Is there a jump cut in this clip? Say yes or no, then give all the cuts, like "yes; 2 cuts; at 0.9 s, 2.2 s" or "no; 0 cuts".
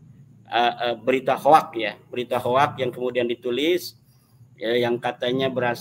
no; 0 cuts